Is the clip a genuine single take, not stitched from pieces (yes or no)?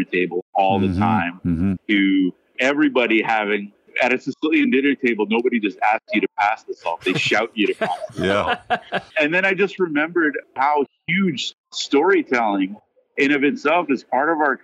yes